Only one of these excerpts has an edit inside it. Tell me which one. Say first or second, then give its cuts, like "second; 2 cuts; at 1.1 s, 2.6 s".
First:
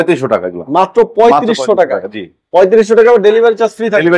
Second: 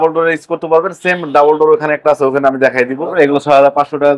second; 1 cut; at 3.1 s